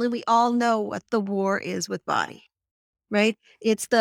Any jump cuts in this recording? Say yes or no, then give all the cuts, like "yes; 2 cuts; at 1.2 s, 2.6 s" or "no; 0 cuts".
no; 0 cuts